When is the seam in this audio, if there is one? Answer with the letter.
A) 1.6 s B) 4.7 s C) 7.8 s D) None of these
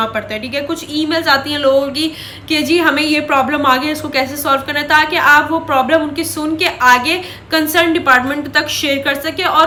D